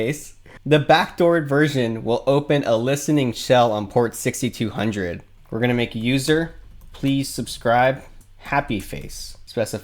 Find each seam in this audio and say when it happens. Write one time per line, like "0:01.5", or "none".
0:05.4